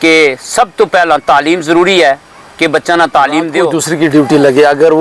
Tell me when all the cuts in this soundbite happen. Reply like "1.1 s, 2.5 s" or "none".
3.8 s